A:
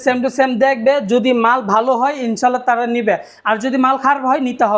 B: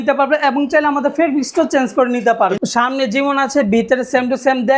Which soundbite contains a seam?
B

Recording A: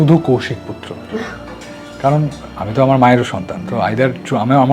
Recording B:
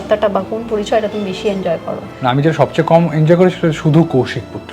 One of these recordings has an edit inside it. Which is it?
B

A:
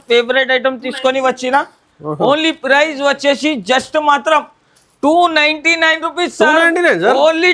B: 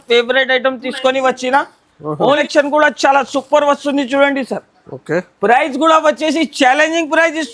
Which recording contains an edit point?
B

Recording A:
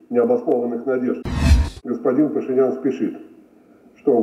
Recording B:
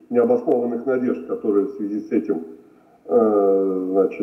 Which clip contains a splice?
A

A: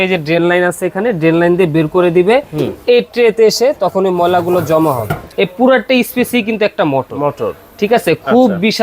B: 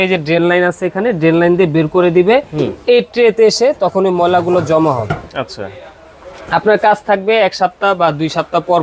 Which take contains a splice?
A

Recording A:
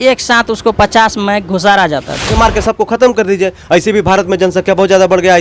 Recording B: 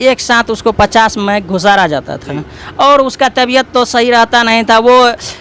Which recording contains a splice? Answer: A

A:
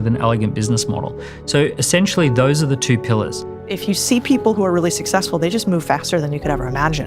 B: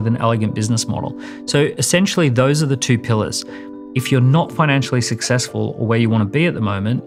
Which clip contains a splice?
A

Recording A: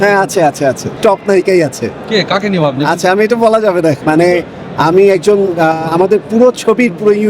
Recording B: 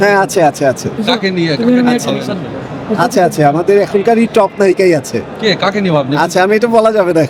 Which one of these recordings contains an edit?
A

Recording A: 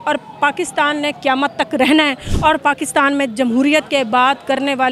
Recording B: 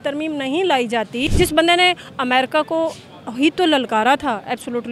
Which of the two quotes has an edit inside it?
B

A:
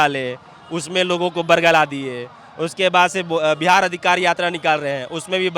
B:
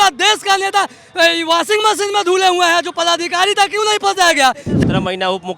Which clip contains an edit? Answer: B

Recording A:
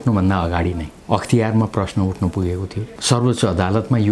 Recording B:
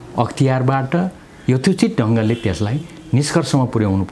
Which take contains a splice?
A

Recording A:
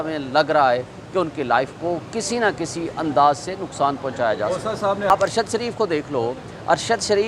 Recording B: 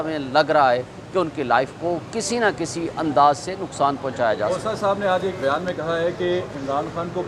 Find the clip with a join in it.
A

